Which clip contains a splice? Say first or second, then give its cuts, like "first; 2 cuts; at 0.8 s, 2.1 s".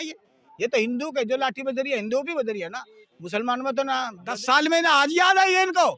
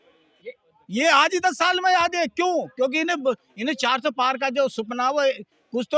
first; 1 cut; at 4.2 s